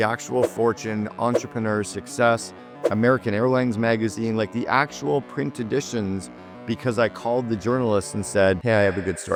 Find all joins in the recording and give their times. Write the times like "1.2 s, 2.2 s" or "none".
none